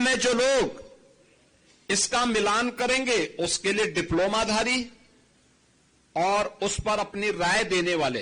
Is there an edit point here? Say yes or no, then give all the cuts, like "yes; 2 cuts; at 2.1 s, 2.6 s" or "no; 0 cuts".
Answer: no; 0 cuts